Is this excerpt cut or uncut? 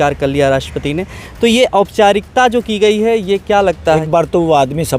cut